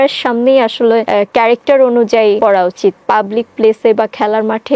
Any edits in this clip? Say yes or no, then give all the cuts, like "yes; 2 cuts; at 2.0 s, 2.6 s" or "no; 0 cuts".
yes; 2 cuts; at 1.1 s, 2.4 s